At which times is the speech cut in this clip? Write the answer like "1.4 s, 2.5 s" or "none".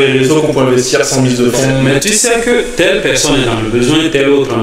1.8 s

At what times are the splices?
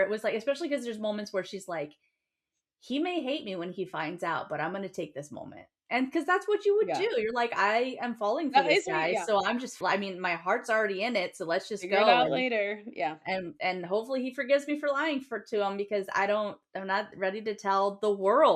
9.8 s, 16.7 s

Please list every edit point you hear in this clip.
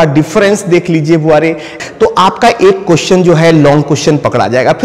1.8 s

